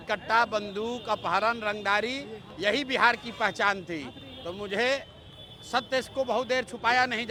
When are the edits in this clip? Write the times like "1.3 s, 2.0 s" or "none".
none